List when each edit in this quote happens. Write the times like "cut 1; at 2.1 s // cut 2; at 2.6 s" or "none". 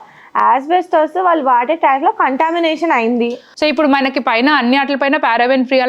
cut 1; at 3.4 s